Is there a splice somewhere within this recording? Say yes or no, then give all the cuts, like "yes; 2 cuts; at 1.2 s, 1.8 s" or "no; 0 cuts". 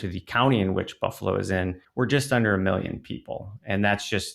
yes; 1 cut; at 1.8 s